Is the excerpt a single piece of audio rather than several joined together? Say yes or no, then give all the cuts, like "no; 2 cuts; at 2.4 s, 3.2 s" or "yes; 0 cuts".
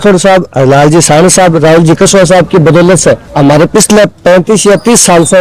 yes; 0 cuts